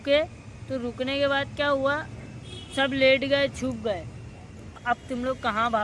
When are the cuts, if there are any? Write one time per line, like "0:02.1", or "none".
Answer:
0:04.8